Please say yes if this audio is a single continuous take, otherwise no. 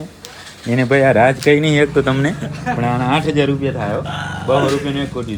yes